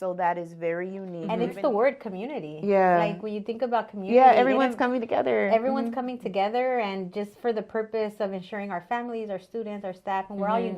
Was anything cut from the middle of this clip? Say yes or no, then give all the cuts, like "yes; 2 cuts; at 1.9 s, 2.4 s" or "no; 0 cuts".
yes; 1 cut; at 1.1 s